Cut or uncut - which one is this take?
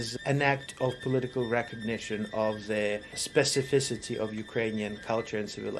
cut